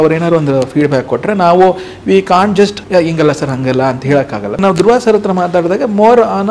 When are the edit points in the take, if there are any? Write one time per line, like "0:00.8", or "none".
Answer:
0:02.8
0:04.6